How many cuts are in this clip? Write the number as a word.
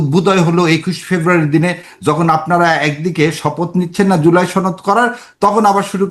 zero